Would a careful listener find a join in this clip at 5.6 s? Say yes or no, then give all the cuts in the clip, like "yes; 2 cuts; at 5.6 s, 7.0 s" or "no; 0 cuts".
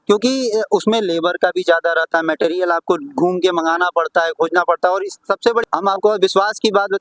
yes; 1 cut; at 5.6 s